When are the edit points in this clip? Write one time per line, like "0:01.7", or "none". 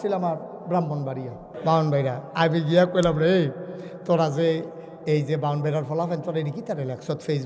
0:01.4